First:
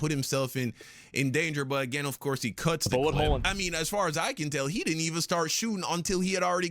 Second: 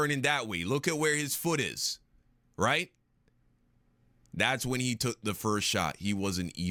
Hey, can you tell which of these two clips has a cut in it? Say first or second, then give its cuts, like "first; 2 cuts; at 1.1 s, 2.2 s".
first; 1 cut; at 3.4 s